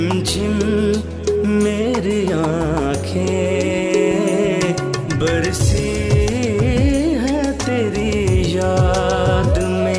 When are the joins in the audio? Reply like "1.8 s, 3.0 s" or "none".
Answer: none